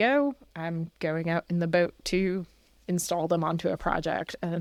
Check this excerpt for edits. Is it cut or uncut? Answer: uncut